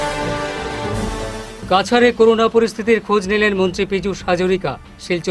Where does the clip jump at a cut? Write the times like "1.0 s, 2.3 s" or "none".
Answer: none